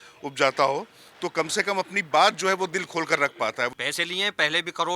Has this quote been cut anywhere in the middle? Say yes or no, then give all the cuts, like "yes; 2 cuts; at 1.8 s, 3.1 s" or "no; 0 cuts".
yes; 1 cut; at 3.7 s